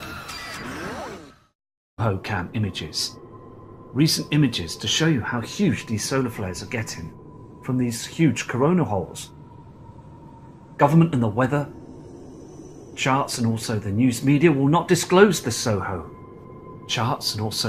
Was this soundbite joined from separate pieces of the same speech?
no; 0 cuts

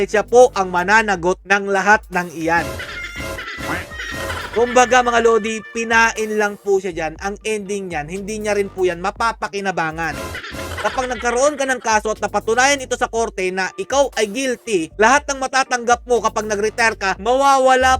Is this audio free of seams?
yes; 0 cuts

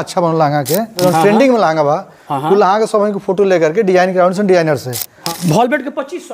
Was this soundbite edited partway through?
yes; 2 cuts; at 1.0 s, 5.2 s

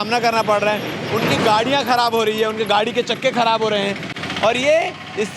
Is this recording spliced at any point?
no; 0 cuts

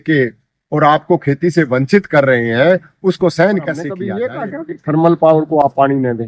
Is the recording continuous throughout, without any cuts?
no; 1 cut; at 4.0 s

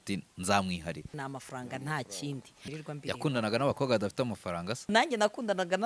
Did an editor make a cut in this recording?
yes; 3 cuts; at 1.1 s, 2.7 s, 4.9 s

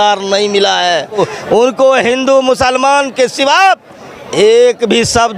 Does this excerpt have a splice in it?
yes; 1 cut; at 1.2 s

